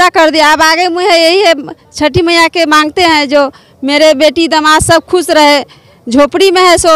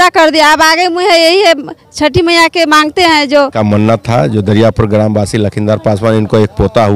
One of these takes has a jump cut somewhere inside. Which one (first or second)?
second